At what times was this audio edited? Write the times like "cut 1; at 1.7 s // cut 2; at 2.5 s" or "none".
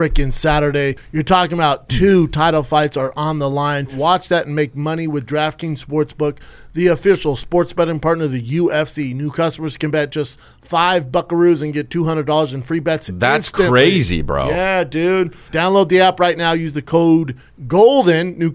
cut 1; at 1.0 s // cut 2; at 3.9 s // cut 3; at 15.4 s